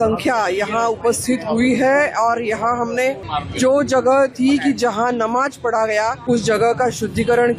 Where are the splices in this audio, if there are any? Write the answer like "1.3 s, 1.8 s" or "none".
3.3 s, 6.2 s